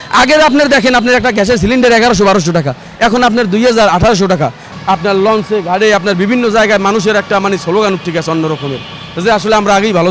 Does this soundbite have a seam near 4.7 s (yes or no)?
yes